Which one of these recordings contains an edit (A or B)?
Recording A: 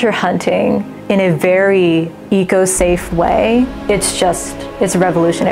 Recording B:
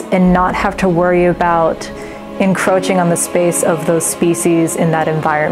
A